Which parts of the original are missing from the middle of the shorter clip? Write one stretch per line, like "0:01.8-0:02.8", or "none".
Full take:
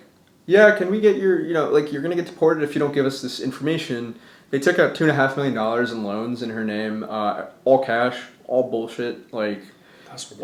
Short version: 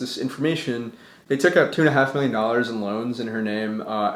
none